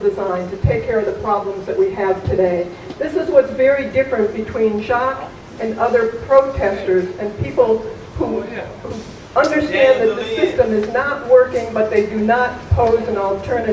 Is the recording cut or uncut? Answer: cut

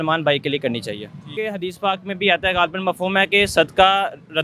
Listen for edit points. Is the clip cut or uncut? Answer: cut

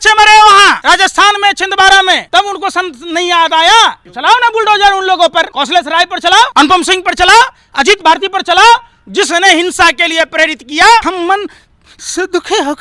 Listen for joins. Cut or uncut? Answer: cut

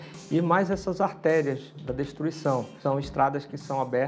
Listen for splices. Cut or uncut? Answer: cut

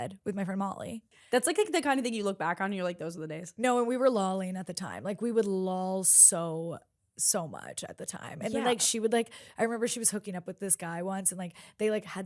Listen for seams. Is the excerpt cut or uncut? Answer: cut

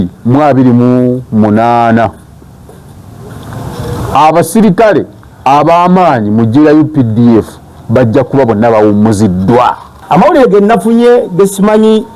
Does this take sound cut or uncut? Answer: cut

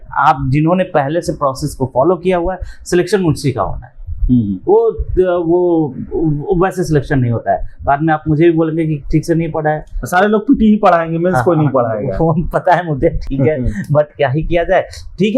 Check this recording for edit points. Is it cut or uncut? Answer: uncut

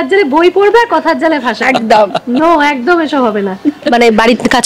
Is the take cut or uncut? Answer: uncut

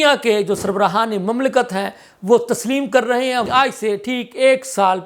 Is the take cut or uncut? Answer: cut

